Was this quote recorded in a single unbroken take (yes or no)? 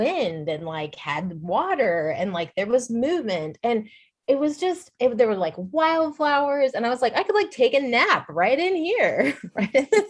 yes